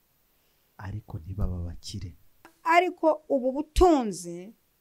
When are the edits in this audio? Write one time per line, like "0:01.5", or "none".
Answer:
0:02.6